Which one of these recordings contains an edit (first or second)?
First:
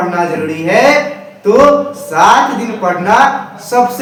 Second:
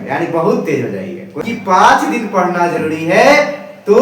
second